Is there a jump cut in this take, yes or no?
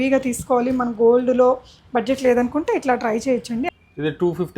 yes